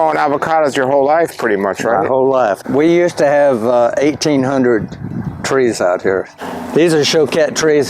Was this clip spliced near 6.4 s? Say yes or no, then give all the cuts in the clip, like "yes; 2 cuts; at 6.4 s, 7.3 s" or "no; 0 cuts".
yes; 2 cuts; at 2.6 s, 6.4 s